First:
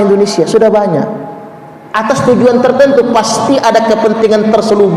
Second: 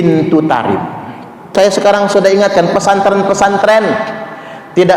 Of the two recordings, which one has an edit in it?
second; 1 cut; at 1.5 s

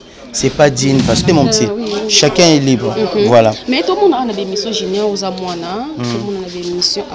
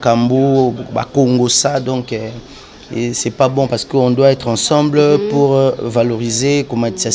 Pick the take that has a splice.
first; 1 cut; at 1.2 s

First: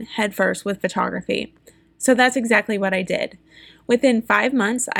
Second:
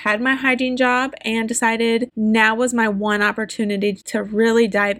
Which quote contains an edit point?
second; 2 cuts; at 2.1 s, 4.0 s

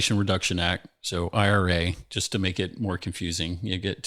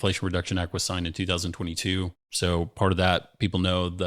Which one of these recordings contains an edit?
second; 1 cut; at 2.3 s

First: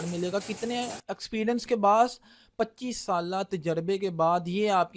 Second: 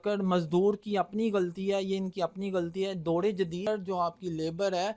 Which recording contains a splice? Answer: second; 1 cut; at 3.7 s

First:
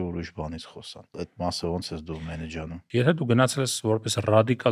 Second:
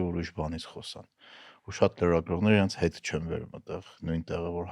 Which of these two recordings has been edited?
first; 2 cuts; at 1.1 s, 2.8 s

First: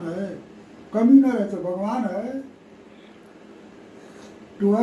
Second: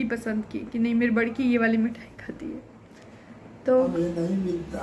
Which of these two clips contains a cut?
second; 1 cut; at 3.9 s

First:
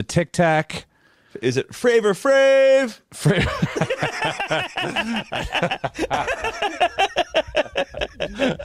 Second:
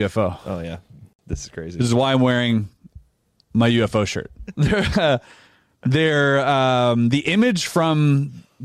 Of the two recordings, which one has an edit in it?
second; 1 cut; at 4.4 s

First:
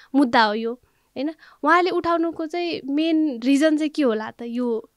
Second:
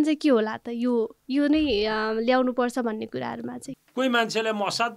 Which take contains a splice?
second; 1 cut; at 3.6 s

